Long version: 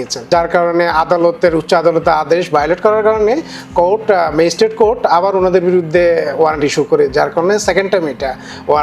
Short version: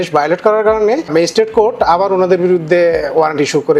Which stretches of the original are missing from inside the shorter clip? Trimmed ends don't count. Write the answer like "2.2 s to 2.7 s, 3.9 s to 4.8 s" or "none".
3.5 s to 4.3 s